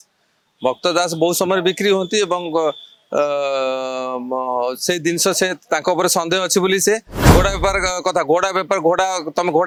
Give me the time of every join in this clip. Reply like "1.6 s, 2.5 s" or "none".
none